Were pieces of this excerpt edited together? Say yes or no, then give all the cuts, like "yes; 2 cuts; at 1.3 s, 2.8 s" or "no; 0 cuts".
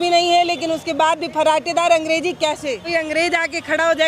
yes; 1 cut; at 2.8 s